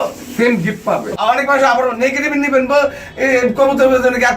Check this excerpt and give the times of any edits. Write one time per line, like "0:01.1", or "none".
0:01.1